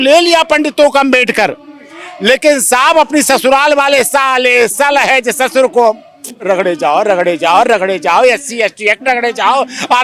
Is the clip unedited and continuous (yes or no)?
yes